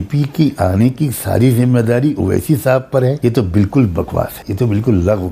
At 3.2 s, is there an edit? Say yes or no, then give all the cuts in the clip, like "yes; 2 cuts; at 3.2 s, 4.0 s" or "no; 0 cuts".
yes; 2 cuts; at 3.2 s, 4.4 s